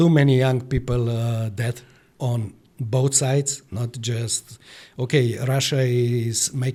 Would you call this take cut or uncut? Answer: uncut